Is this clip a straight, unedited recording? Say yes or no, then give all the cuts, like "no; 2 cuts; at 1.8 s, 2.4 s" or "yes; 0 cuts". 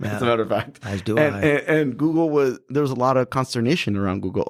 yes; 0 cuts